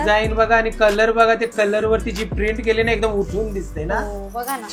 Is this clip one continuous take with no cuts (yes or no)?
yes